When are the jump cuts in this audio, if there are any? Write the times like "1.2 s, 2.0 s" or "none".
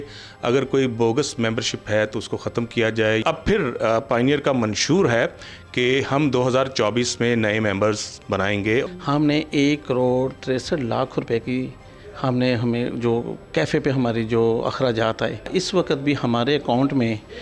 3.2 s, 8.8 s, 15.5 s